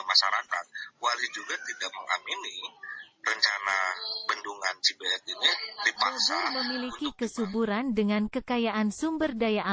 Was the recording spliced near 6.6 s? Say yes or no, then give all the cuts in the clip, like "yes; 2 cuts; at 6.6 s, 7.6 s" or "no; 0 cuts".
yes; 1 cut; at 6.6 s